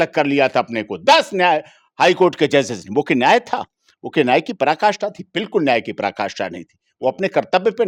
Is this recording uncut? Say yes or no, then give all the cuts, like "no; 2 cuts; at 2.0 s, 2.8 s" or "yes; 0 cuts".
yes; 0 cuts